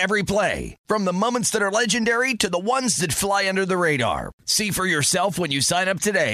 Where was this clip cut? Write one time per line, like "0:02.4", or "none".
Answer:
none